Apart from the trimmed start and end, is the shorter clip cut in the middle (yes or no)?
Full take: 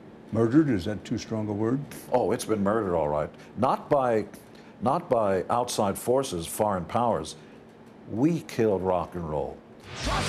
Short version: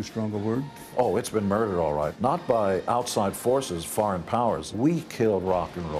yes